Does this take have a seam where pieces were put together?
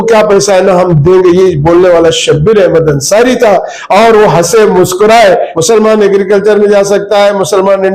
yes; 1 cut; at 5.5 s

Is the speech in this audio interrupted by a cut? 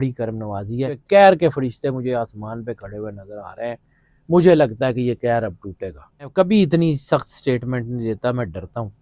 yes; 2 cuts; at 1.0 s, 6.3 s

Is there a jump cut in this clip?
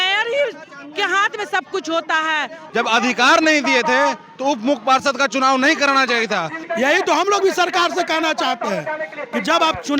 yes; 2 cuts; at 2.6 s, 6.6 s

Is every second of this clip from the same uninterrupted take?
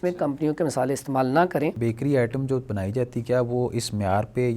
no; 1 cut; at 1.8 s

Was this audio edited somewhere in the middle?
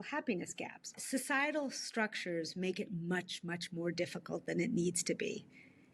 yes; 1 cut; at 1.0 s

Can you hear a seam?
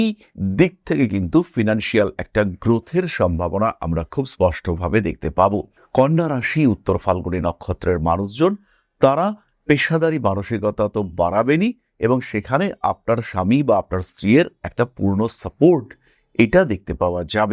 no; 0 cuts

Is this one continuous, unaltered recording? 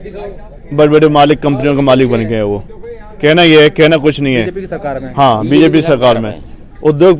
yes; 0 cuts

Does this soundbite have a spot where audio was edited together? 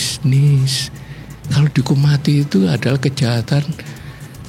no; 0 cuts

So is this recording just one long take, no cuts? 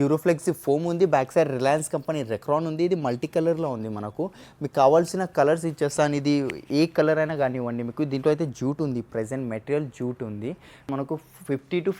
no; 1 cut; at 10.9 s

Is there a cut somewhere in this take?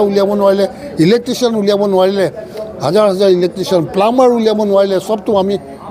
no; 0 cuts

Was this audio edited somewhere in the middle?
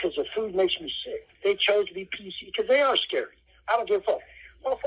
yes; 1 cut; at 1.3 s

